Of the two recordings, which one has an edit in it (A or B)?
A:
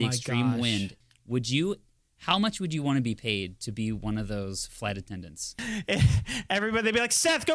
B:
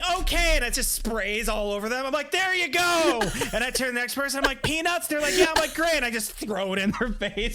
A